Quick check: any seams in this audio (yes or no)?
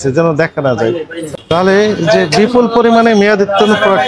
yes